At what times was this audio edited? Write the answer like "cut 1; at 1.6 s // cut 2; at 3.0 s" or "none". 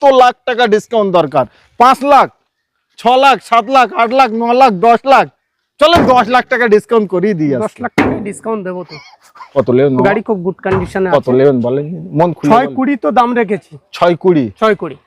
none